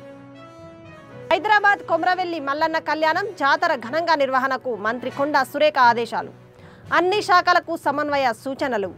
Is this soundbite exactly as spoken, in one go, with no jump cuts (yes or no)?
no